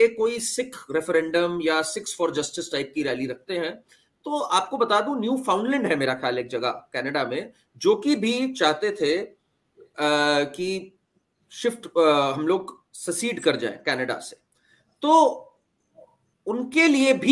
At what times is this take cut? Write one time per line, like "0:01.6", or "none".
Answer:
none